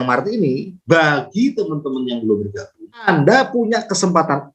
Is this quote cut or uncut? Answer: cut